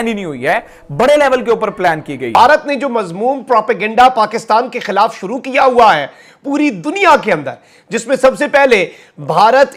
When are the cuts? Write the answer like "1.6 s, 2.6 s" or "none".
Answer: none